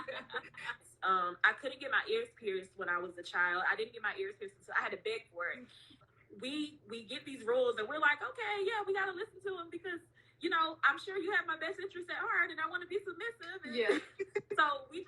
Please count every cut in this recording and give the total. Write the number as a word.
two